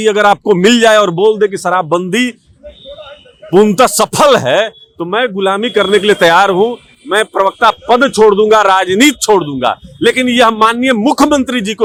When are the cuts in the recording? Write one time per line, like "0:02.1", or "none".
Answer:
none